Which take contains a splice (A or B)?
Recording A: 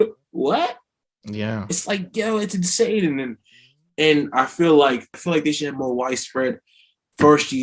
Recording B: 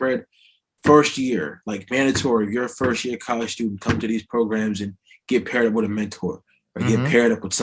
A